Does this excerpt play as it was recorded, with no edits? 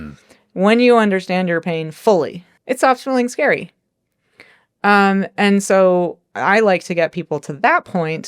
no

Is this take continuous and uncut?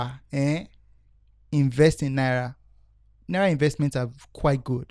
yes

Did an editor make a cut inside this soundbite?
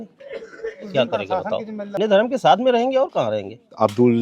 yes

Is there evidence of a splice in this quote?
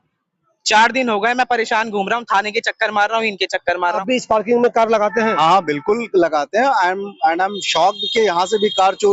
yes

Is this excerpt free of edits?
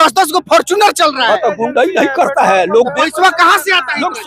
yes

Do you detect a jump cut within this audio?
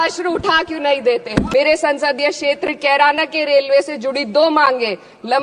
yes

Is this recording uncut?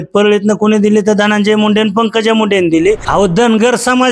no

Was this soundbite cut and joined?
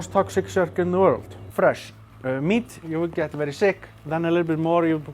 yes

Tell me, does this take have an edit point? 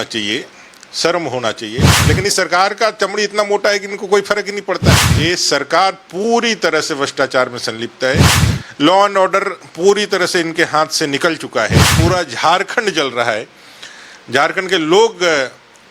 yes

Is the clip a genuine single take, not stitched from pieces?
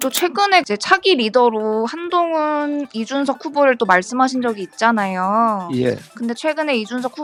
yes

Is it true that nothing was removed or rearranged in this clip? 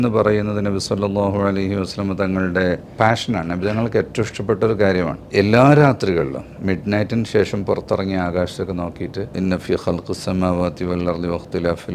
no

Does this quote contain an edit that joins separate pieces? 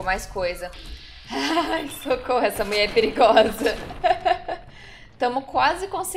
no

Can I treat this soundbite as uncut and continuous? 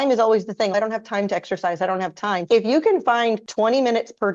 no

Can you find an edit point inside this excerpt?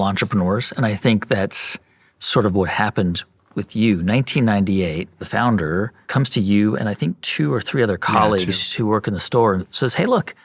yes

